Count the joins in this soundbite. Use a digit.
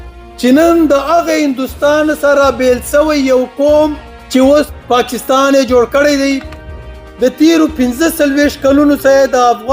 1